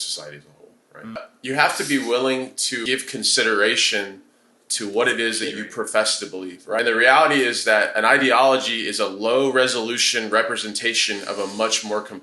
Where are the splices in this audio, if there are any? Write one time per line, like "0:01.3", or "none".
0:01.3
0:02.8
0:06.8

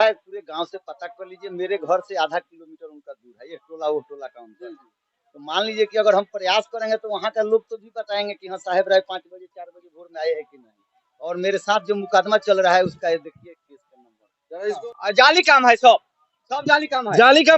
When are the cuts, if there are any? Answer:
0:14.8

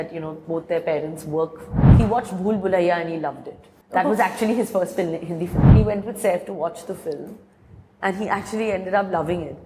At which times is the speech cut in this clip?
0:01.8
0:05.7

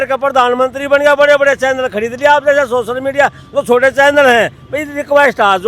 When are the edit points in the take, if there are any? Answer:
none

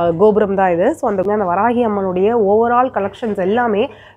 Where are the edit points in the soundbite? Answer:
0:01.2

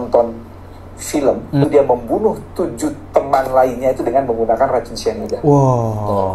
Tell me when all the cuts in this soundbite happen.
0:01.6

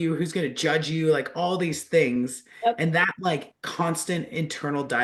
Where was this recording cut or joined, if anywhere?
none

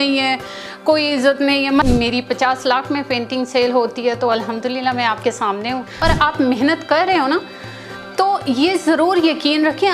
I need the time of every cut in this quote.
0:01.8
0:06.0

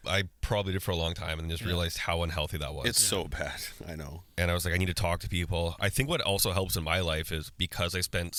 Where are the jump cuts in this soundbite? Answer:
none

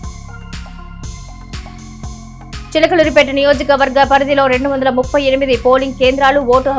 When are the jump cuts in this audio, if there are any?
0:01.6

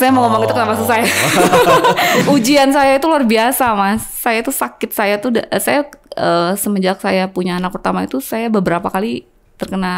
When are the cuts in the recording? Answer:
0:02.2

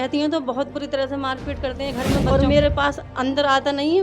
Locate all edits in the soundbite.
0:02.3

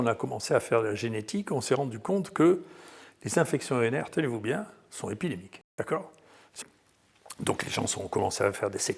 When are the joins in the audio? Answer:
0:05.6
0:06.4

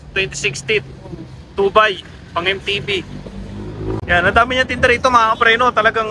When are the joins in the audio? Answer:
0:04.0

